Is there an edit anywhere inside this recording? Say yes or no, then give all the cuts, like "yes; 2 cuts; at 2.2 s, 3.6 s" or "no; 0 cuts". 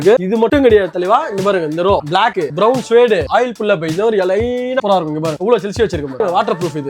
yes; 2 cuts; at 4.8 s, 6.2 s